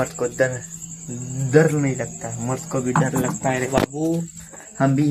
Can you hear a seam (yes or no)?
no